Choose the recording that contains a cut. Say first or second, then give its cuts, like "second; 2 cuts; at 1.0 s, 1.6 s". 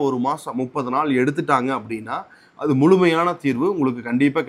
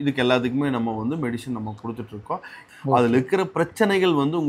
second; 1 cut; at 2.5 s